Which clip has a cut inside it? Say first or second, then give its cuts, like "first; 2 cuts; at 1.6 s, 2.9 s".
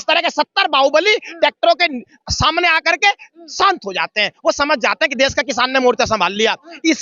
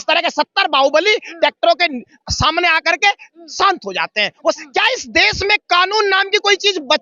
second; 1 cut; at 4.6 s